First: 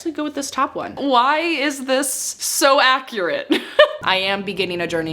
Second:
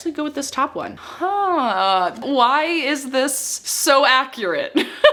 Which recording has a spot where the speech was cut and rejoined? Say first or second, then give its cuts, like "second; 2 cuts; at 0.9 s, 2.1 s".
first; 2 cuts; at 0.9 s, 4.0 s